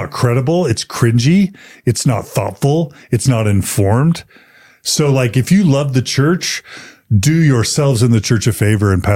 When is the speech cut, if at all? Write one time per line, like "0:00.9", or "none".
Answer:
none